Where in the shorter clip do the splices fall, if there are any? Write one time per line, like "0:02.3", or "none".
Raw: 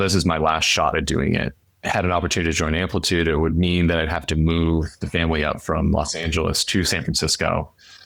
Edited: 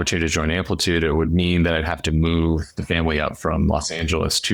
none